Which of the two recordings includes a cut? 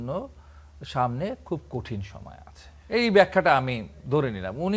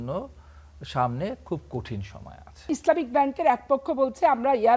second; 1 cut; at 2.7 s

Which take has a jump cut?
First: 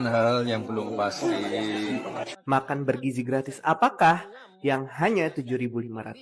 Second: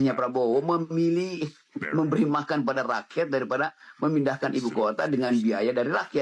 first; 1 cut; at 2.3 s

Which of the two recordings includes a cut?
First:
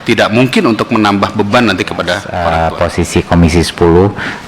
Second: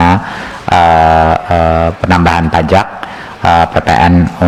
first; 1 cut; at 2.3 s

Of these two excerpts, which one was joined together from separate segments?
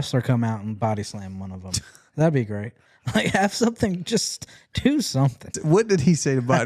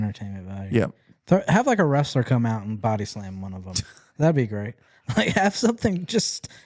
first; 1 cut; at 5.6 s

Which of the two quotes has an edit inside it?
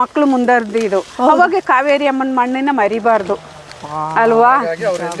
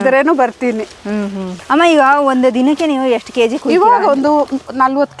second; 1 cut; at 1.5 s

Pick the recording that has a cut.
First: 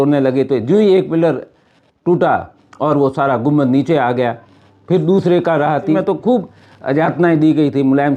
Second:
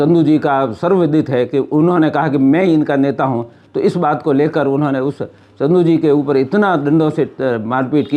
first; 1 cut; at 6.0 s

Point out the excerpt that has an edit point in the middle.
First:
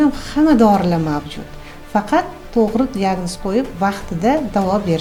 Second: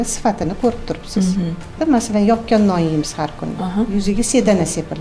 second; 1 cut; at 1.7 s

